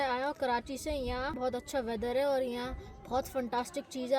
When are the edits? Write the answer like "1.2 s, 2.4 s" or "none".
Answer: 1.4 s